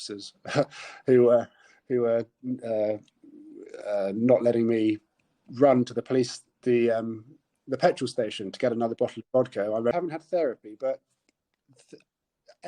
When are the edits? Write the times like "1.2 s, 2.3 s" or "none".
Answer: 9.9 s